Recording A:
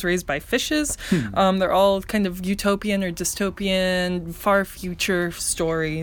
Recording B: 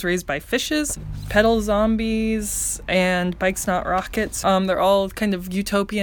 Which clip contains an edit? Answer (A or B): B